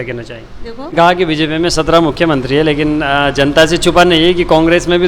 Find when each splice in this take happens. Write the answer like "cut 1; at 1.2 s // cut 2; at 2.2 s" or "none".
cut 1; at 0.9 s